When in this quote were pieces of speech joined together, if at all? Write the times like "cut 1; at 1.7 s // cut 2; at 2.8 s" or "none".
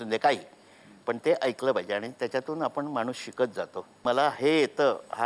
cut 1; at 4.0 s